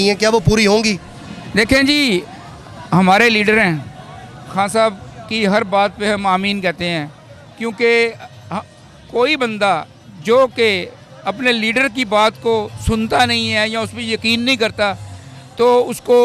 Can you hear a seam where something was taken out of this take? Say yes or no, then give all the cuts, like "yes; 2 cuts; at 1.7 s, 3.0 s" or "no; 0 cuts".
no; 0 cuts